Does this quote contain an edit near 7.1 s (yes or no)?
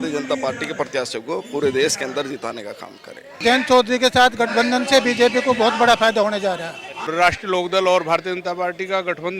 yes